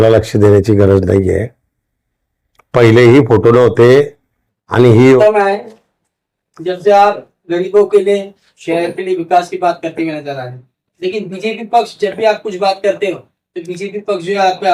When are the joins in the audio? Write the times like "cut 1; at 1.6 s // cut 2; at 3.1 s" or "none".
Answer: cut 1; at 5.2 s